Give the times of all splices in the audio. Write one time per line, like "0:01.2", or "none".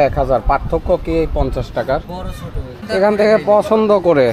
0:02.8